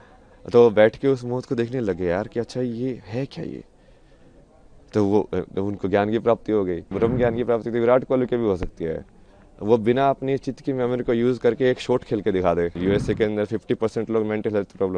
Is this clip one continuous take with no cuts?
no; 2 cuts; at 6.9 s, 12.8 s

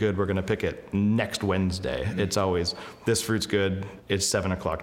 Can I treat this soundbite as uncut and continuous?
no; 1 cut; at 3.9 s

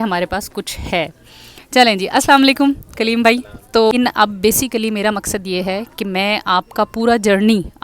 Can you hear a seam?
yes; 1 cut; at 3.9 s

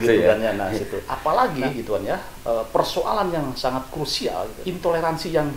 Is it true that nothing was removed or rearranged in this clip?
no; 2 cuts; at 1.0 s, 4.6 s

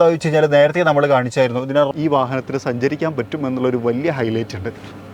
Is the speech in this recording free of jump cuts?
no; 1 cut; at 1.9 s

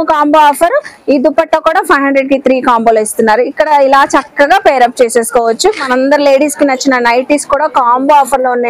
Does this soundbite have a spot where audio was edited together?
no; 0 cuts

